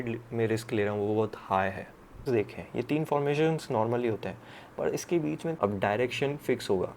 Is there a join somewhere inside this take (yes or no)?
yes